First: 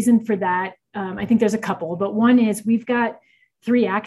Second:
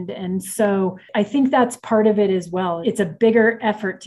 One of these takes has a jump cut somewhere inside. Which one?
second; 2 cuts; at 1.0 s, 2.8 s

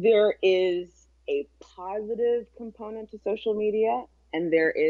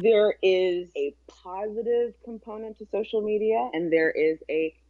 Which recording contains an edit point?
second; 2 cuts; at 0.9 s, 3.7 s

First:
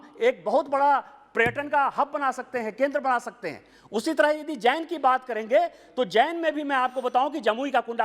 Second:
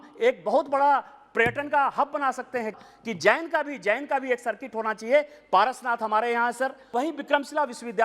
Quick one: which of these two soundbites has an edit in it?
second; 2 cuts; at 2.8 s, 6.9 s

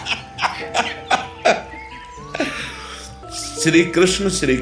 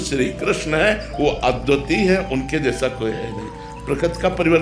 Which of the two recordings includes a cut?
first; 1 cut; at 3.2 s

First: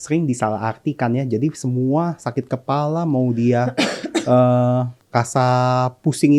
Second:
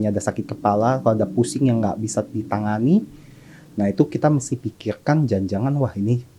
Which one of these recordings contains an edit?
first; 1 cut; at 5.0 s

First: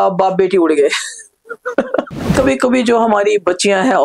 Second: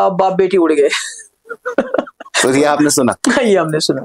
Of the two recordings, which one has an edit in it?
first; 1 cut; at 2.3 s

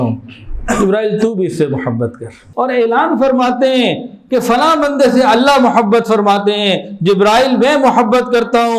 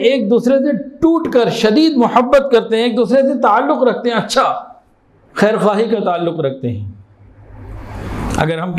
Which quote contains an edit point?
first; 1 cut; at 2.4 s

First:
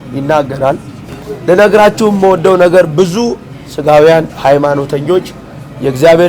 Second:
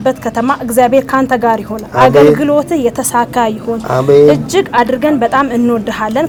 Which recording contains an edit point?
first; 1 cut; at 1.1 s

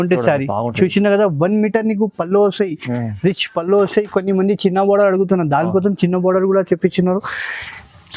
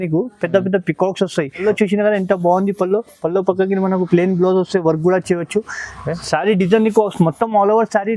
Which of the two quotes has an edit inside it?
second; 1 cut; at 1.6 s

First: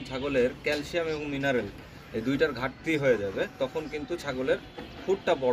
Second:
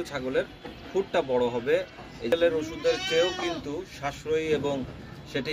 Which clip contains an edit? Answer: second; 1 cut; at 2.3 s

